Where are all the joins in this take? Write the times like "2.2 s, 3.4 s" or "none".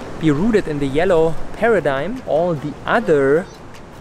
2.2 s